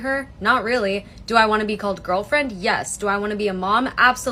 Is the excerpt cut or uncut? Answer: uncut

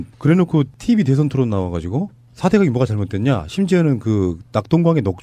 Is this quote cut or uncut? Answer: uncut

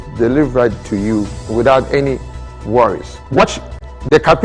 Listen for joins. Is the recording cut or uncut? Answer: cut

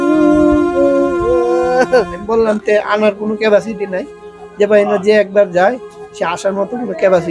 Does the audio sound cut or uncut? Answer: cut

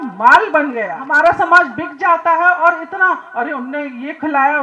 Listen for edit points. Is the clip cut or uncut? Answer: cut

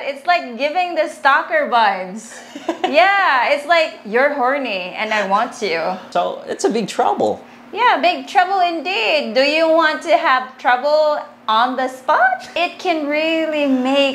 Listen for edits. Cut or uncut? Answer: cut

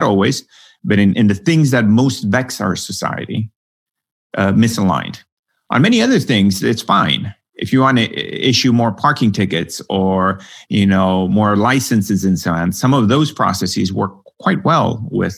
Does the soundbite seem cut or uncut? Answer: cut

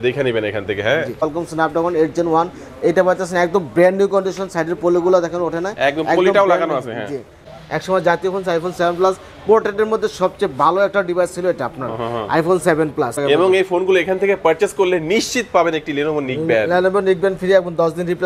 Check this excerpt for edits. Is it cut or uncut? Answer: cut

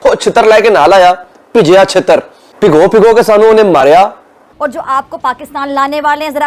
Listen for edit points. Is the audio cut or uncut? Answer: cut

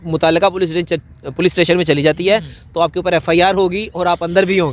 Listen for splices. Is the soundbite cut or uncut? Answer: uncut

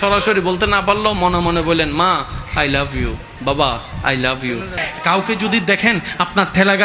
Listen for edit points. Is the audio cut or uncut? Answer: cut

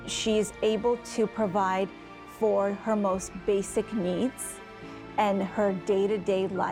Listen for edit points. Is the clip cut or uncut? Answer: uncut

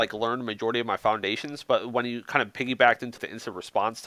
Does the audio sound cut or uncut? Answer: cut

